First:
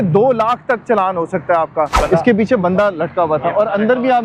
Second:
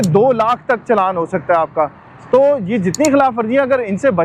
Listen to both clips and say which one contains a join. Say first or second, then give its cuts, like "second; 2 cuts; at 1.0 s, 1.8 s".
first; 1 cut; at 2.0 s